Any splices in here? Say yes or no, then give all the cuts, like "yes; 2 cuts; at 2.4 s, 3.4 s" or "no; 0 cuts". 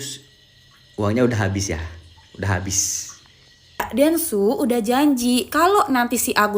yes; 1 cut; at 3.8 s